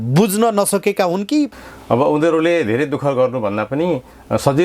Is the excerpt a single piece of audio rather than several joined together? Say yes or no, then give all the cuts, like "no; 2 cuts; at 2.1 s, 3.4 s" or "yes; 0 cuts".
no; 1 cut; at 1.5 s